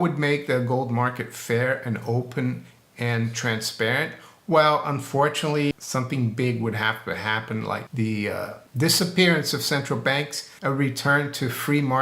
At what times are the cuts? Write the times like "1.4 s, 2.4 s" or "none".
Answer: 5.7 s, 7.9 s, 8.6 s, 10.4 s